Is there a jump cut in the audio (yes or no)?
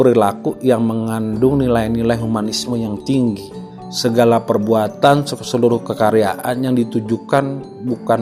no